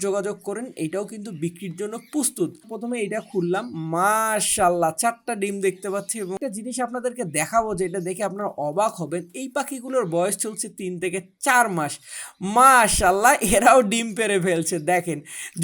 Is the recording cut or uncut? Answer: cut